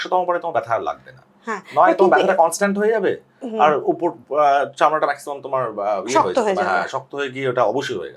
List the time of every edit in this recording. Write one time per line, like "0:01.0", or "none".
none